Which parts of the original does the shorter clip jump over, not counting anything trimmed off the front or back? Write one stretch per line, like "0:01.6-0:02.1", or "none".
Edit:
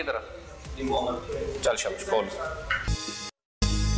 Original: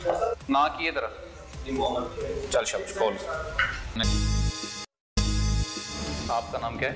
0:03.8-0:04.5

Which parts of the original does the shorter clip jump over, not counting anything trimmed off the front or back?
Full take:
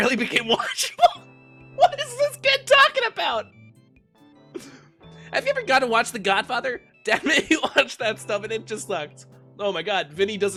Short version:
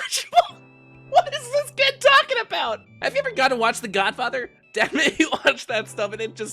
0:03.5-0:05.2

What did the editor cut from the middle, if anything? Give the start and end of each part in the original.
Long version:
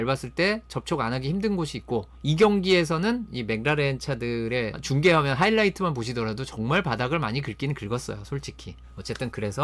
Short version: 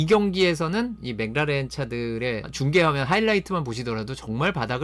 none

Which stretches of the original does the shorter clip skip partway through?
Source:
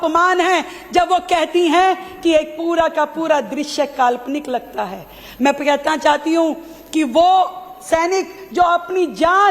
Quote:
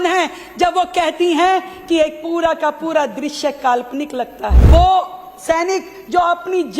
0:05.0-0:07.1

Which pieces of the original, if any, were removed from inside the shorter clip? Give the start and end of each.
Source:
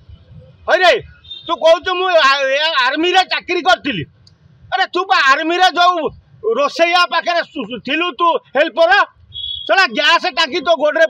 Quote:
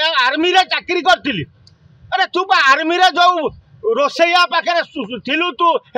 none

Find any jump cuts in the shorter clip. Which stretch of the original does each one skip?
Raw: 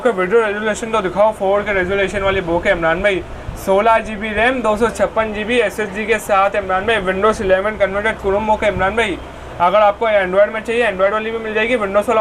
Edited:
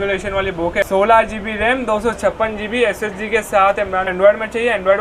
0:02.8-0:03.6
0:06.9-0:10.2

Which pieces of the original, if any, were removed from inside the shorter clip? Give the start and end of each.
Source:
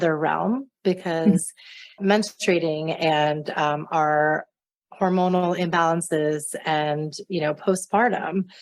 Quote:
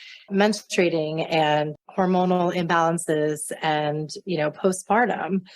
0:03.5-0:04.8

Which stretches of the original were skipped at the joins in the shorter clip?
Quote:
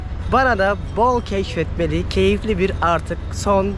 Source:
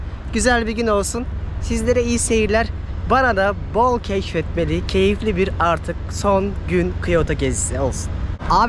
none

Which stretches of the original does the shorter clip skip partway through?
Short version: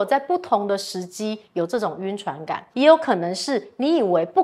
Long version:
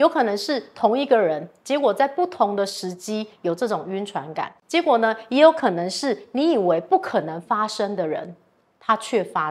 0:04.6-0:05.2

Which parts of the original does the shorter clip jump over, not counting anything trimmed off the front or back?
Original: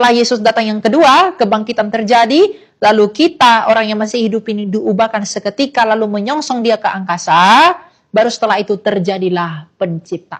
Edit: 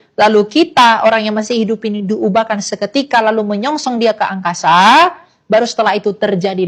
none

